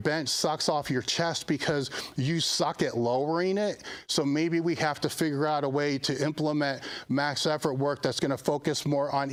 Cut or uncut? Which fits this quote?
uncut